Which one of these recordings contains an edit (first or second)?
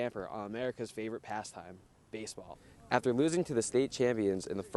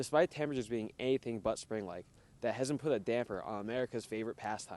first